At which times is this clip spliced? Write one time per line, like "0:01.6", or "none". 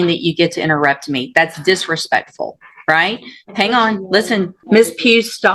0:04.6